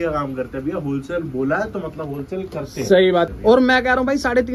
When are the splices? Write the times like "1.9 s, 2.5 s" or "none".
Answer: 3.3 s